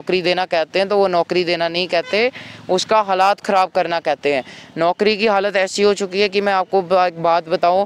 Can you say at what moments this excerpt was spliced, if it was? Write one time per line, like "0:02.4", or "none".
none